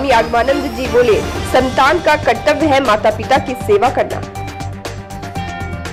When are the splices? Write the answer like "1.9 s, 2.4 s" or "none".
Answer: none